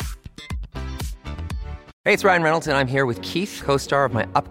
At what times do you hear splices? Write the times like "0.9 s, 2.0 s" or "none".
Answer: 1.9 s